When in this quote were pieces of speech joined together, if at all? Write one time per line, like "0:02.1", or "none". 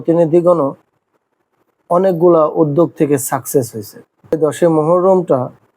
0:04.3